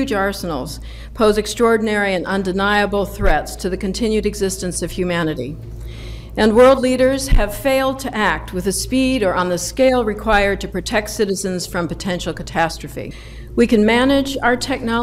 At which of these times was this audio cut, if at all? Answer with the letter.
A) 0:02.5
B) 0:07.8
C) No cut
A